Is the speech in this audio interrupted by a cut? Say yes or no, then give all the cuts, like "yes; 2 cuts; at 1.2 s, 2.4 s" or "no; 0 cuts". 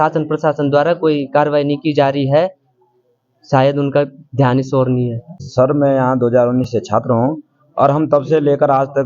yes; 1 cut; at 5.4 s